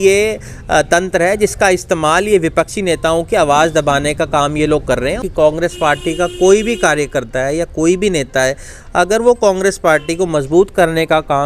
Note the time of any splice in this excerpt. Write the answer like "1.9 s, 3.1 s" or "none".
5.2 s